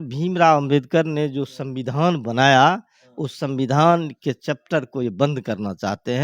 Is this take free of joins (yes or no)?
yes